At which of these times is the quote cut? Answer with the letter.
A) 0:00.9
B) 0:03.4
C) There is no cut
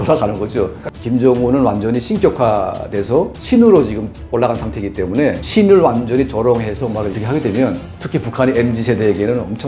A